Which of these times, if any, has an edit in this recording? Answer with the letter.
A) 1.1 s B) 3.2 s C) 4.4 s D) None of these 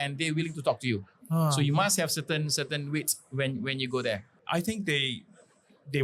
C